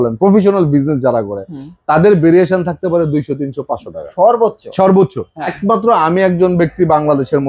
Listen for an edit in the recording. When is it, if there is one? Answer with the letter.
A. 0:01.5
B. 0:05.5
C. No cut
B